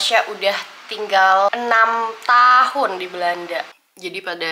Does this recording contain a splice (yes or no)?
yes